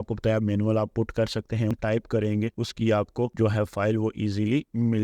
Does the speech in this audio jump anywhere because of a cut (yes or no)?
yes